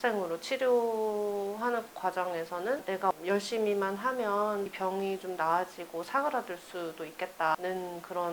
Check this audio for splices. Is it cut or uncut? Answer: uncut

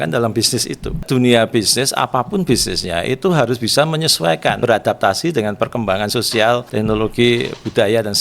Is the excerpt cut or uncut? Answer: cut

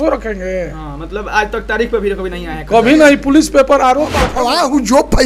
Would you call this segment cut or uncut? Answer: cut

